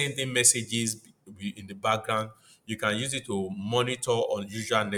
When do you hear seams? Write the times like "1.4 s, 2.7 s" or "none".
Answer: none